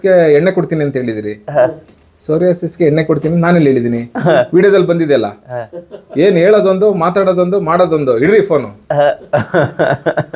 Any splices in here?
no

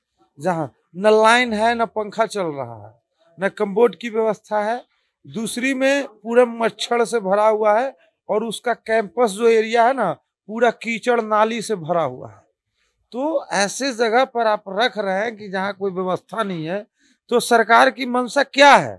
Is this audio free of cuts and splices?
yes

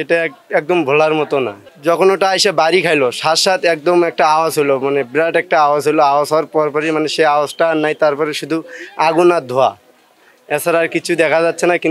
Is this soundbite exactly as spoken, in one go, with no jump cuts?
yes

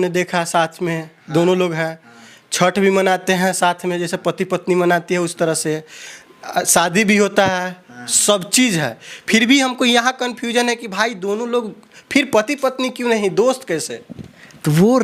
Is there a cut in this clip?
no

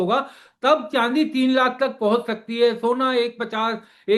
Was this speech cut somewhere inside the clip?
no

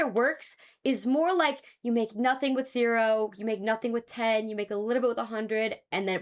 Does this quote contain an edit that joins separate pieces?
no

